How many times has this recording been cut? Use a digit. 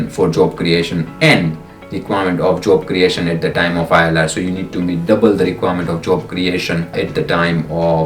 1